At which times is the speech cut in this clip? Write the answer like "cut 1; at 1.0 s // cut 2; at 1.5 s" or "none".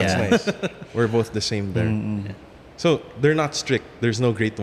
none